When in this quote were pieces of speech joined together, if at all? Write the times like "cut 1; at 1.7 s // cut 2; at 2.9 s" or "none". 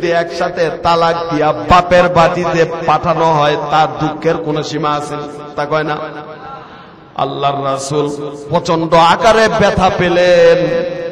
cut 1; at 5.6 s